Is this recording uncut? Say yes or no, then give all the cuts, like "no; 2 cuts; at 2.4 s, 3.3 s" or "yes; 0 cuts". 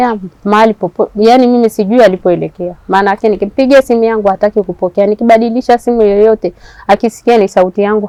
yes; 0 cuts